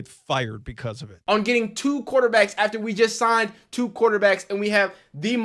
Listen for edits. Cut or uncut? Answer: cut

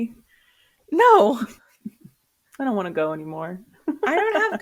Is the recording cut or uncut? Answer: uncut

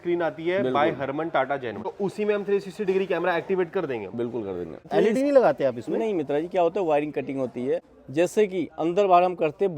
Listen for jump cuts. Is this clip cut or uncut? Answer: cut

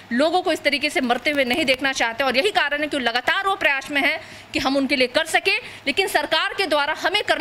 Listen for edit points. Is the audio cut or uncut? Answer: uncut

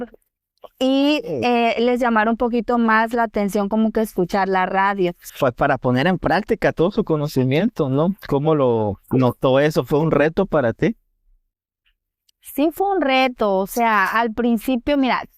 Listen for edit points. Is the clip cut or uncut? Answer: cut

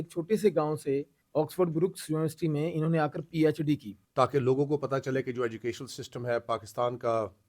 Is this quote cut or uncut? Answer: cut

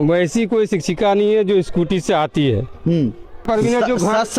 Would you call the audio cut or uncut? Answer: cut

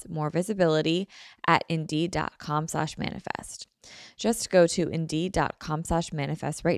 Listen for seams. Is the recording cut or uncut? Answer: uncut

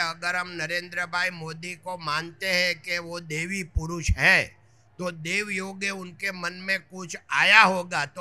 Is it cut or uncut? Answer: uncut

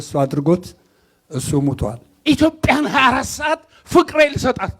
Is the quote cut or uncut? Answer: cut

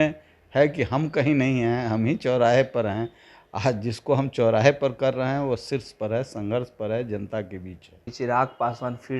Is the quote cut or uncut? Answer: cut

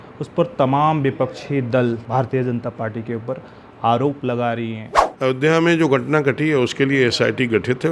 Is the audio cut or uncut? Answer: cut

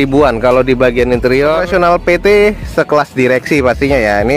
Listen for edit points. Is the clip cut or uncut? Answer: cut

